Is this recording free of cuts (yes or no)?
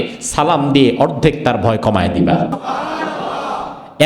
no